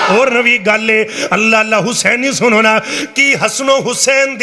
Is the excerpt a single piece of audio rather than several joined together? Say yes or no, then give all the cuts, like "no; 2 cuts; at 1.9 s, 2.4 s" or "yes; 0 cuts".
yes; 0 cuts